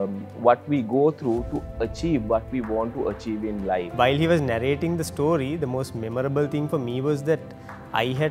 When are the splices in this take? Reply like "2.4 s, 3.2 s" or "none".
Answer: 3.9 s